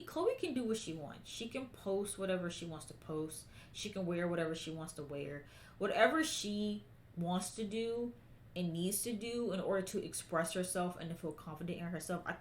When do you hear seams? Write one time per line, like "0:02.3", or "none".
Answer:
none